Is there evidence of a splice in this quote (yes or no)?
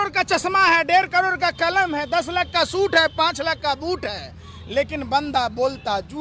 no